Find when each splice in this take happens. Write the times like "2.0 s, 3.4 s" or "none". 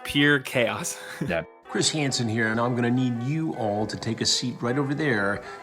1.5 s